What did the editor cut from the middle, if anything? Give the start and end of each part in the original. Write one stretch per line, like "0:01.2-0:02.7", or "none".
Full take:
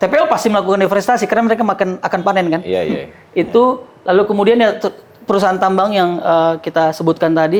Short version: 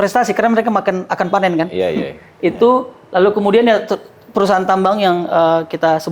none